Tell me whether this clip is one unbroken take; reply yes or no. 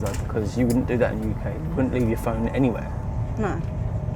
yes